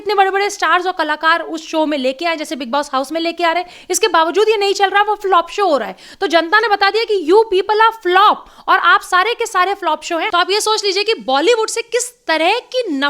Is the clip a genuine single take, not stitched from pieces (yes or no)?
no